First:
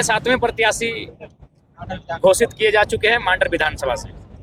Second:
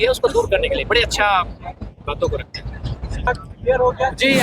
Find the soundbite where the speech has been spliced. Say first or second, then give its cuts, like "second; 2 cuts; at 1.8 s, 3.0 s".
second; 1 cut; at 3.3 s